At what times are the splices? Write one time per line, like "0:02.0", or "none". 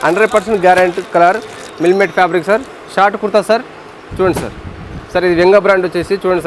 0:02.7